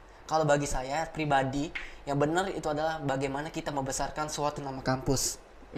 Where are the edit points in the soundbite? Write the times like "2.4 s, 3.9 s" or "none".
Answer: none